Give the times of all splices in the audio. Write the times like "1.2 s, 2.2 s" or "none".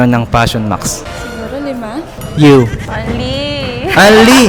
2.2 s